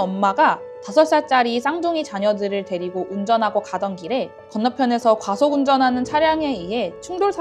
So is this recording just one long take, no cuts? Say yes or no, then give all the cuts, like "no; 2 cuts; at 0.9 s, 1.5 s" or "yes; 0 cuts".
no; 1 cut; at 4.4 s